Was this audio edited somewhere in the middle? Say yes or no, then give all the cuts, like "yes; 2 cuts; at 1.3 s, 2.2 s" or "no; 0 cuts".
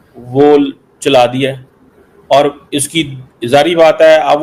no; 0 cuts